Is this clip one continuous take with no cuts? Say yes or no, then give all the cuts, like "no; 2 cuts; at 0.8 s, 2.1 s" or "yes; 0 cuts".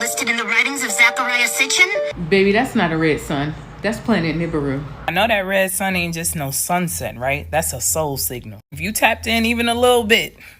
no; 2 cuts; at 2.2 s, 5.1 s